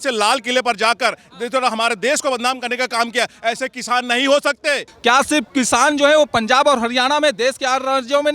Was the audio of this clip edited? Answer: yes; 1 cut; at 4.9 s

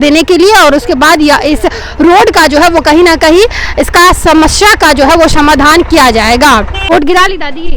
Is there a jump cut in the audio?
yes; 1 cut; at 6.8 s

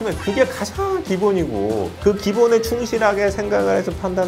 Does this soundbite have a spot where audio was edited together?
yes; 1 cut; at 1.9 s

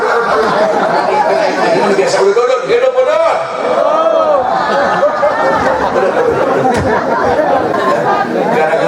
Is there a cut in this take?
yes; 1 cut; at 7.7 s

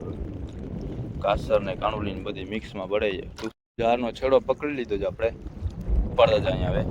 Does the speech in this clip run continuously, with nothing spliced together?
no; 1 cut; at 3.6 s

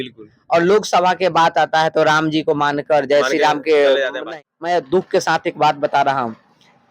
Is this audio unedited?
no; 1 cut; at 4.2 s

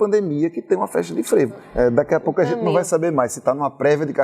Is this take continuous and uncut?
no; 1 cut; at 1.6 s

